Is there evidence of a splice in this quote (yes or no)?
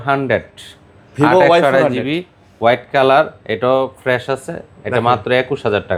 no